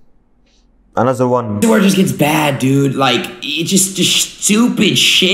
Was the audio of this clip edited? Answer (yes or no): yes